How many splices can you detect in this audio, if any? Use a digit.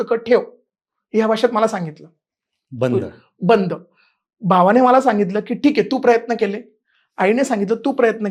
0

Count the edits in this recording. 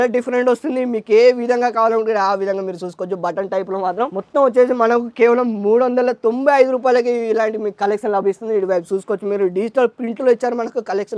0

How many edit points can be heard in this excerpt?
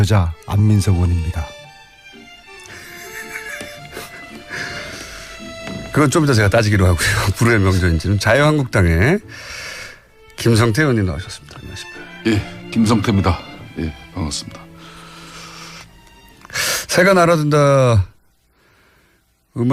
0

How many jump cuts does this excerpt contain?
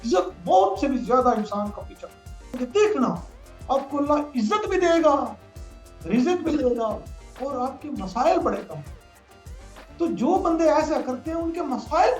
1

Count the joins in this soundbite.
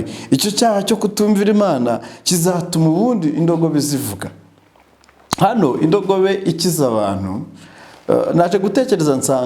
0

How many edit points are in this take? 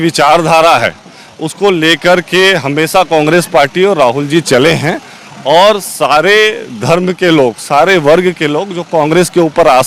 0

